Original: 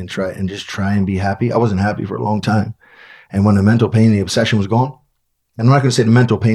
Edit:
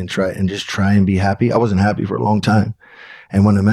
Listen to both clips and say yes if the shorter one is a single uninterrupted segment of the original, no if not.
yes